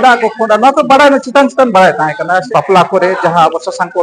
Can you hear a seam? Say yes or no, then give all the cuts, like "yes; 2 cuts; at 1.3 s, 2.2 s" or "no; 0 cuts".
yes; 1 cut; at 2.5 s